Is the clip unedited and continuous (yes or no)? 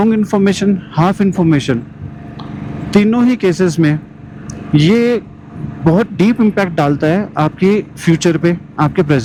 yes